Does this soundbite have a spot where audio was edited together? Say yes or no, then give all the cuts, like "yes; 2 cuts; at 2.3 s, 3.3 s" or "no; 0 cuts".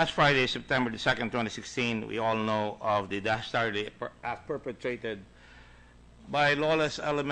no; 0 cuts